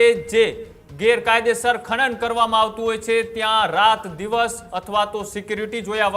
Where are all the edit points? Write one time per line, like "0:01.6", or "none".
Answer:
none